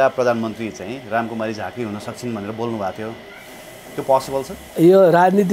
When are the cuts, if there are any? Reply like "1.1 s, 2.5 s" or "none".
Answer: 4.6 s